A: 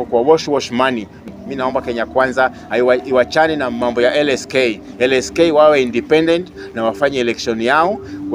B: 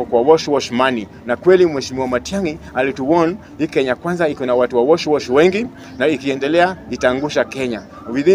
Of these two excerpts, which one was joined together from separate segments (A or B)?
A